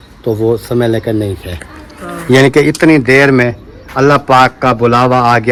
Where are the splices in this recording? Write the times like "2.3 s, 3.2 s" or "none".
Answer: none